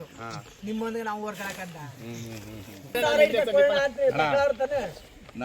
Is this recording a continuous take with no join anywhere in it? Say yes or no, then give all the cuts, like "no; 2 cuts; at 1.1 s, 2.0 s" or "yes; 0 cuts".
no; 1 cut; at 3.0 s